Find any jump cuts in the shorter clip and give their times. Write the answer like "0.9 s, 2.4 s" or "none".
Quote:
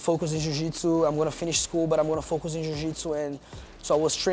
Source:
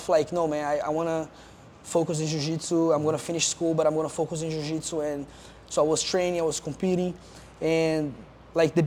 none

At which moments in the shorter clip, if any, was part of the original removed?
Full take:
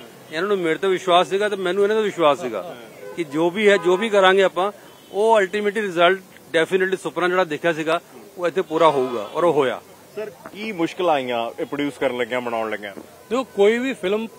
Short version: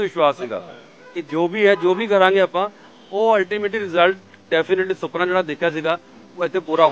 none

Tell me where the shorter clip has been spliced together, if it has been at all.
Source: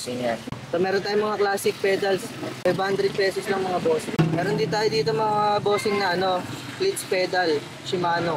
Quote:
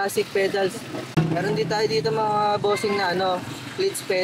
1.1 s

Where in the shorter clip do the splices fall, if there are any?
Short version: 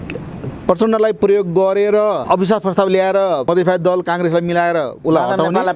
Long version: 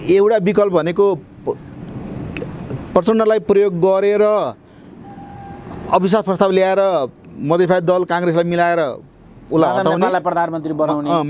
2.2 s, 3.4 s, 4.9 s

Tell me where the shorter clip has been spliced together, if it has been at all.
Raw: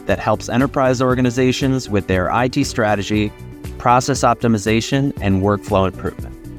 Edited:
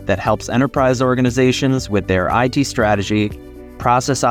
none

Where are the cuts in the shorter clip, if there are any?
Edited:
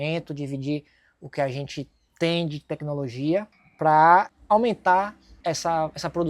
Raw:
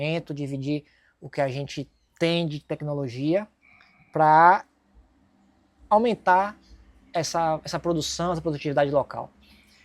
3.6 s, 4.4 s, 5.2 s

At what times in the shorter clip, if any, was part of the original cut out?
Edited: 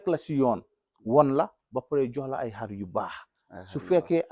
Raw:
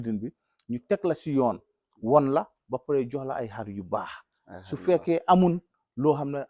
none

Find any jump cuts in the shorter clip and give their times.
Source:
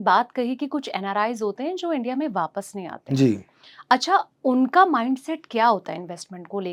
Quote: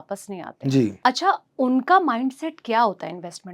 0.9 s

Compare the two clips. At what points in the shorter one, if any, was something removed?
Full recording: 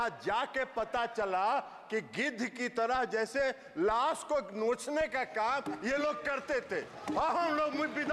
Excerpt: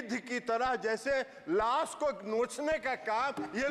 none

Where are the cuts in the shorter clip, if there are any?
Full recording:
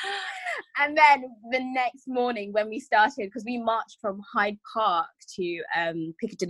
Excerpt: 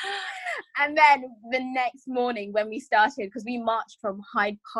none

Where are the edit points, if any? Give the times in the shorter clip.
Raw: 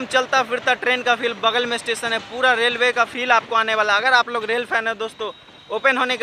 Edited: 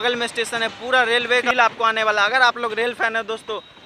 1.5 s

